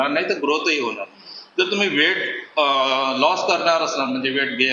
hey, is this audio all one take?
yes; 0 cuts

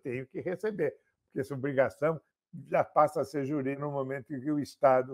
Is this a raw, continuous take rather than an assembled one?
no; 1 cut; at 3.8 s

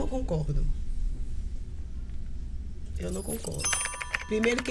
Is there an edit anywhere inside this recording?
no; 0 cuts

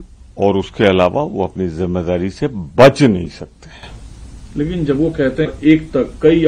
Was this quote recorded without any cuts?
yes; 0 cuts

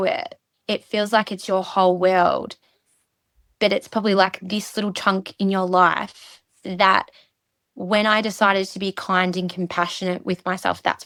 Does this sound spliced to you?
no; 0 cuts

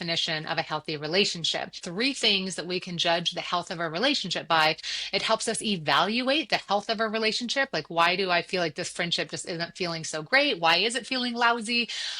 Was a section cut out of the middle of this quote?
yes; 2 cuts; at 1.8 s, 4.9 s

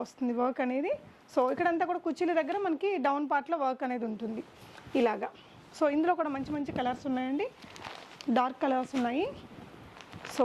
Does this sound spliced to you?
no; 0 cuts

